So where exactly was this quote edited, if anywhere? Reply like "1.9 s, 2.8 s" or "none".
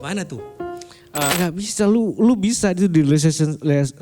1.3 s

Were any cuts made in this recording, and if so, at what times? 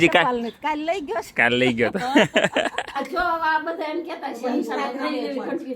2.9 s

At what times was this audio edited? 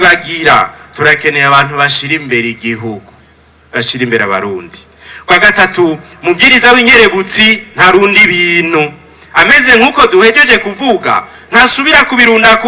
none

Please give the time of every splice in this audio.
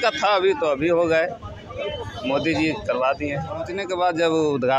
3.8 s

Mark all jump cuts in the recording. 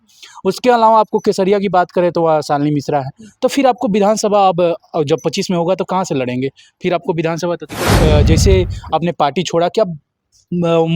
8.0 s

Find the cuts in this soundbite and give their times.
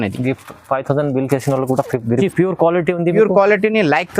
2.2 s

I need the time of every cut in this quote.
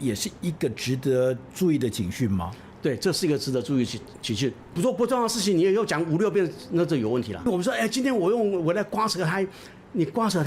4.8 s, 7.5 s

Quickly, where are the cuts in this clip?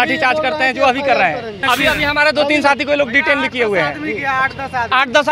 1.5 s

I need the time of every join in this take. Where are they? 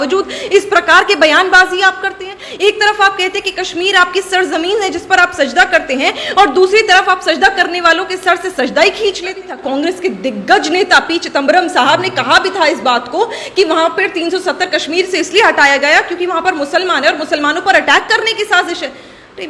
9.6 s

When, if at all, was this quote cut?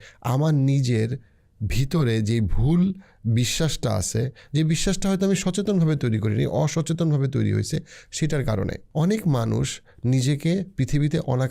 8.8 s

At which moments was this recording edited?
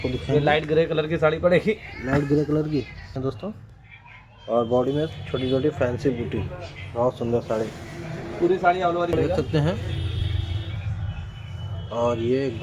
3.1 s, 9.1 s

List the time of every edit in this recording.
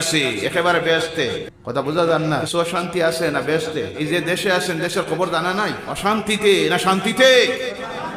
1.5 s, 2.5 s, 3.9 s, 5.9 s

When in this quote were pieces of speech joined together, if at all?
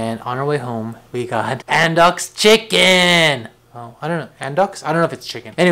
none

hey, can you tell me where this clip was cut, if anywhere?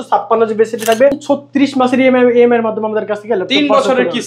1.2 s

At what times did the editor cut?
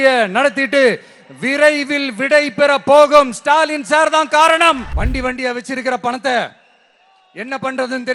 4.9 s

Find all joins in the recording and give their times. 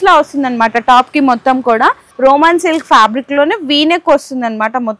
2.1 s

